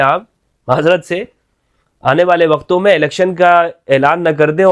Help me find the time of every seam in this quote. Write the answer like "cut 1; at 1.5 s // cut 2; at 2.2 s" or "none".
none